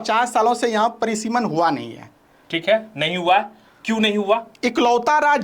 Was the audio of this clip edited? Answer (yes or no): no